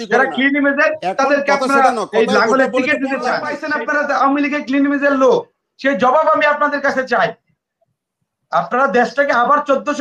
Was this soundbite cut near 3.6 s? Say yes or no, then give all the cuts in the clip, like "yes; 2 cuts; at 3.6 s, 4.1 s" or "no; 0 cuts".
yes; 1 cut; at 3.6 s